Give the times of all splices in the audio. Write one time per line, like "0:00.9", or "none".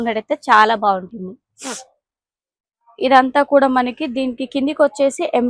none

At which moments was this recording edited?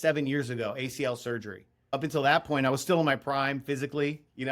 0:01.9

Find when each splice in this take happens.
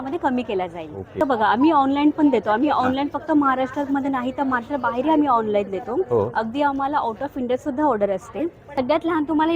0:01.2
0:08.8

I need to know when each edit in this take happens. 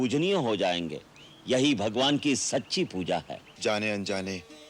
0:03.4

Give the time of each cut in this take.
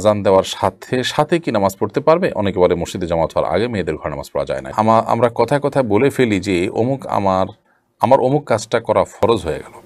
0:04.7

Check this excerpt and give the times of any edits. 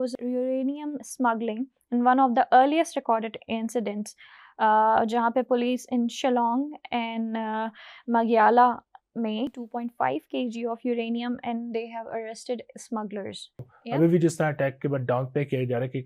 0:13.6

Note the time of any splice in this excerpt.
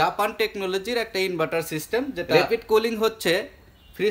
0:02.3

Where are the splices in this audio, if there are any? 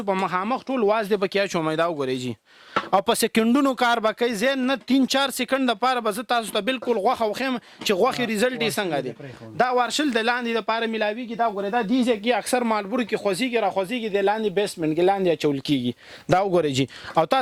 none

